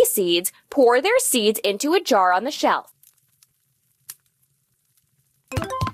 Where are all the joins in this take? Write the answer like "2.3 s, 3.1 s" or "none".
none